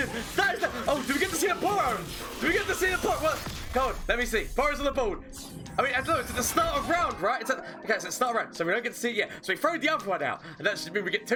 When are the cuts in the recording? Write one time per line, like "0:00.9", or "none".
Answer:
none